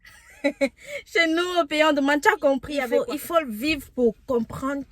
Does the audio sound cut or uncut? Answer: cut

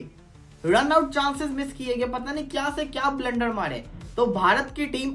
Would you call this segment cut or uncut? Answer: uncut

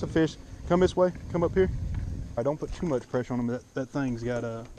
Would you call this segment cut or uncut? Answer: cut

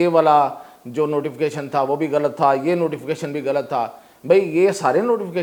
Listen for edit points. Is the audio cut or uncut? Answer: uncut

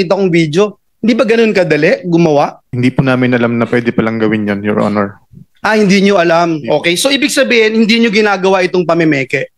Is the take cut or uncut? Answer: cut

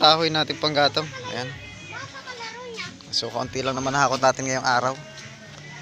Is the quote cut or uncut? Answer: uncut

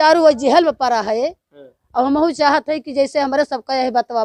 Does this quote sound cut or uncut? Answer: uncut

